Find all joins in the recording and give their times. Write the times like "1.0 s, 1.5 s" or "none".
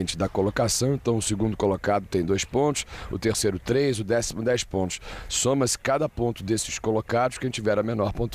3.9 s